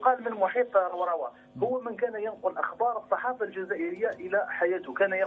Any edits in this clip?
yes; 1 cut; at 2.9 s

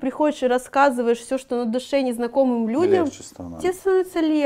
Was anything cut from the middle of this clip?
no; 0 cuts

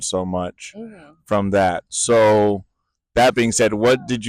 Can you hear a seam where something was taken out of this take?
no; 0 cuts

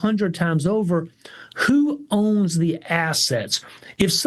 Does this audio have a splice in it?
no; 0 cuts

